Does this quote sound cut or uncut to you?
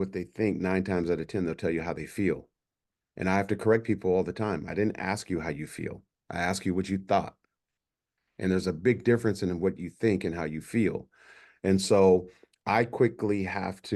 uncut